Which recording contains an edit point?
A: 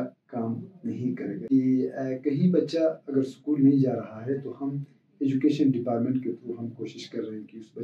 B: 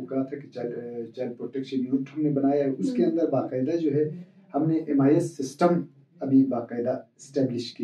A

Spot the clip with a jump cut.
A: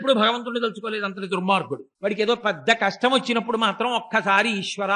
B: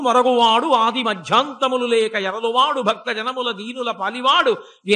A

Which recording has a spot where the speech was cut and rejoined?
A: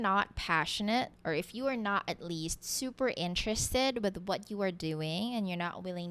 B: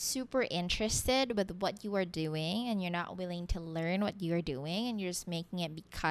A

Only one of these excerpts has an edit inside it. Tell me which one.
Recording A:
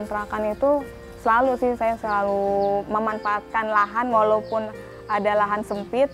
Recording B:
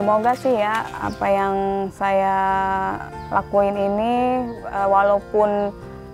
B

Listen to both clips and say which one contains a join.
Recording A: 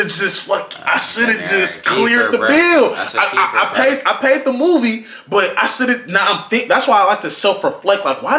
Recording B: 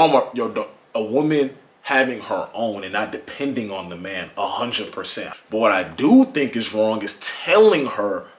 B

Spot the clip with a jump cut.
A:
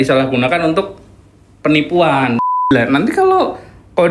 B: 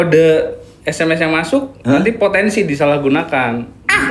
A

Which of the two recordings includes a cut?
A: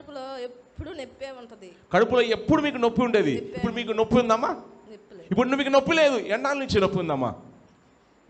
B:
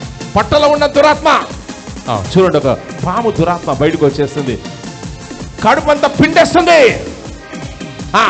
B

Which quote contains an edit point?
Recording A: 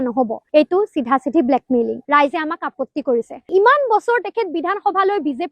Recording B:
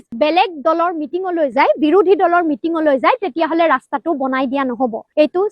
A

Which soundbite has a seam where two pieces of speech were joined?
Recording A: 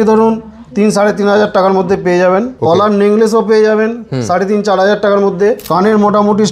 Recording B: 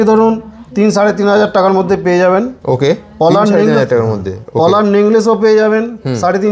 A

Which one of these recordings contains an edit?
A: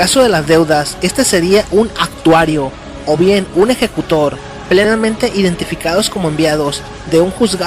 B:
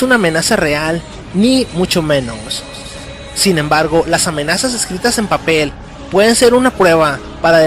B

